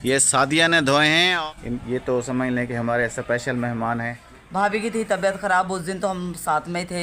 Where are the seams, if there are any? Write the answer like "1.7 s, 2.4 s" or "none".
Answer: 1.3 s, 4.2 s